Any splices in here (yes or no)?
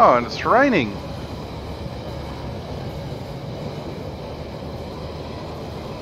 no